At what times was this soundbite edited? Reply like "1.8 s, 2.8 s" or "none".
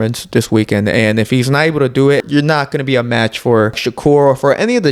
2.2 s, 3.9 s